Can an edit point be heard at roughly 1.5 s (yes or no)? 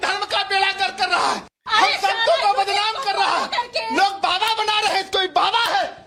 no